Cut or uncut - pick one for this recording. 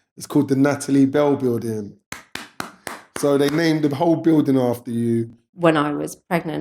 cut